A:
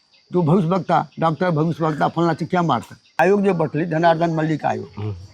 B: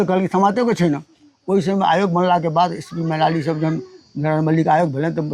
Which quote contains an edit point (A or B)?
A